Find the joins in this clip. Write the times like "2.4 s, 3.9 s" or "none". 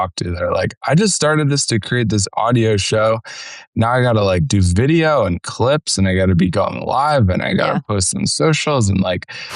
3.7 s